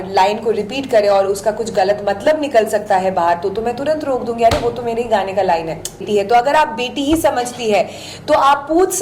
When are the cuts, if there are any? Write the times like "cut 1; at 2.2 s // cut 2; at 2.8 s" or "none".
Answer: cut 1; at 6.0 s